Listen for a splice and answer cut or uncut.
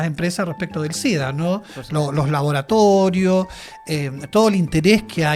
uncut